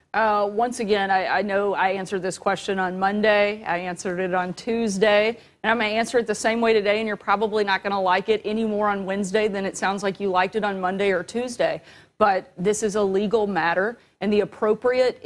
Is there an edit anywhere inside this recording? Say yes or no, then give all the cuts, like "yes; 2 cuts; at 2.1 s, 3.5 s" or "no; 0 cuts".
no; 0 cuts